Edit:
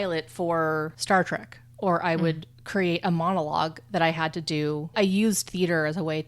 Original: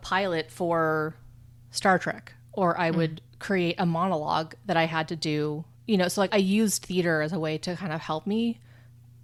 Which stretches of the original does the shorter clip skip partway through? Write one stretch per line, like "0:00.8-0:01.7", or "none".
0:01.2-0:01.7
0:05.7-0:06.3